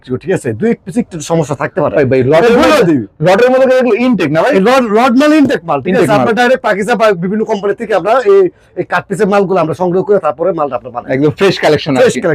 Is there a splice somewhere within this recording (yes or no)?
no